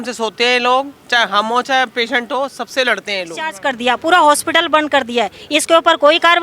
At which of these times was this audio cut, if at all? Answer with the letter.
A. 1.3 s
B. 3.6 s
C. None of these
B